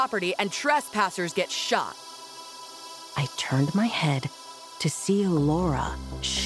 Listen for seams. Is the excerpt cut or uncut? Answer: cut